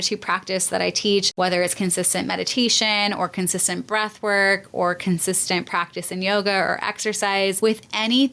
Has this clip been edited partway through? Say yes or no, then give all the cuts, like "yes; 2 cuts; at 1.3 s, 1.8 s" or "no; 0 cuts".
yes; 2 cuts; at 1.3 s, 7.6 s